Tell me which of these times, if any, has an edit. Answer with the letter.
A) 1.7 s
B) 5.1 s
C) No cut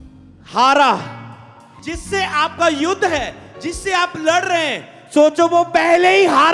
A